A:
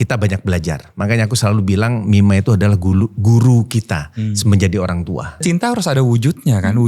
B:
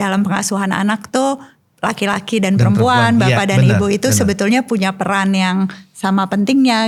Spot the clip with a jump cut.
A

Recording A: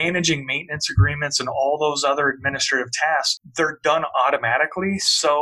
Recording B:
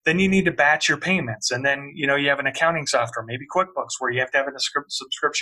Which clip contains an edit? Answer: A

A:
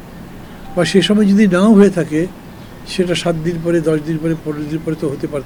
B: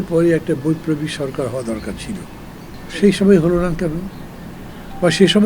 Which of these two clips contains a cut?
B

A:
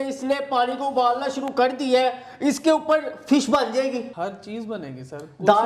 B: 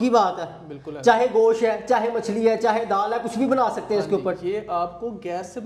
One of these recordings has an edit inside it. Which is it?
A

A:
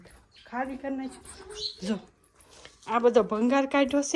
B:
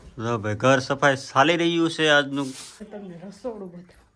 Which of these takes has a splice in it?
B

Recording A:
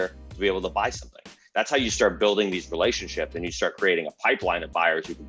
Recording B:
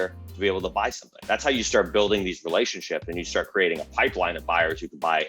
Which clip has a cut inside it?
B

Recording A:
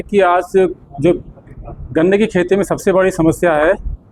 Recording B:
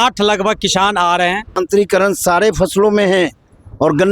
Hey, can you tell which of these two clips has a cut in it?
B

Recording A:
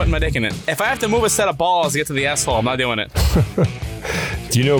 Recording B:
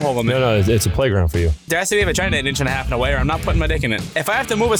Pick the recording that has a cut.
B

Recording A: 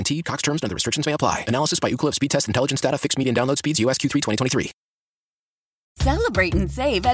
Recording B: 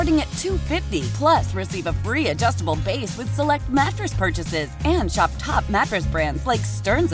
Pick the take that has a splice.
A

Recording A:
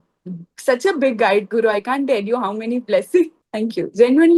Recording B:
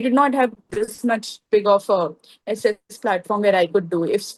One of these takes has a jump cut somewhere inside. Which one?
A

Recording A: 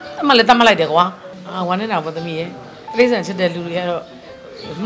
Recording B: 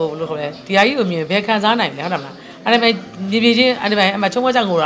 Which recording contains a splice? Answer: A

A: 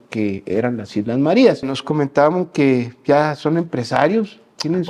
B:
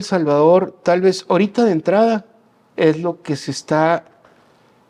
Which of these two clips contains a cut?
A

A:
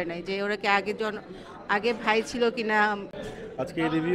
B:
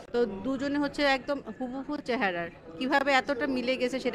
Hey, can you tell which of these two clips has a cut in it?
A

